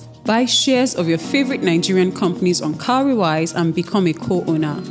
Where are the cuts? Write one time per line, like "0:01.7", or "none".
none